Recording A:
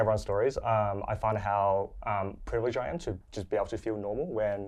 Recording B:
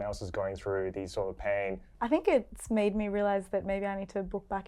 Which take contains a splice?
B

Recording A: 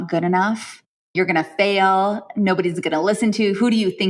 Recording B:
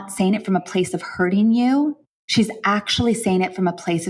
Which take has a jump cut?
A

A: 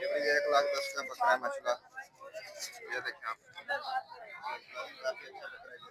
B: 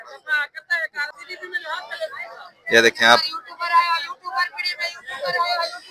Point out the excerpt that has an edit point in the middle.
B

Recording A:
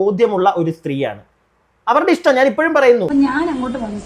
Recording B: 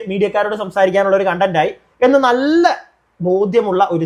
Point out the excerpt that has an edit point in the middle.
A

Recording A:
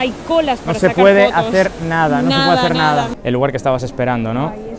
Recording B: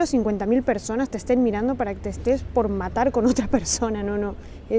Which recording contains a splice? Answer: A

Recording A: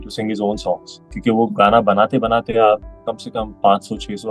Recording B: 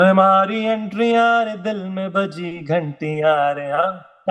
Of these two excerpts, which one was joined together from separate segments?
A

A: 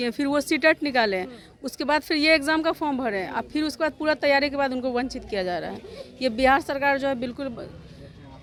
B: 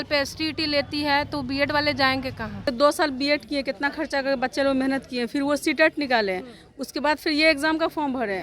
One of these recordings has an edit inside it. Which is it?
B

